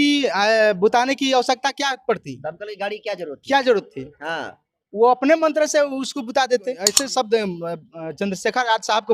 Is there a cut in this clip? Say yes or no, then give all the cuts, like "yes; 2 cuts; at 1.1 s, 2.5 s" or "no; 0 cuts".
yes; 1 cut; at 7.0 s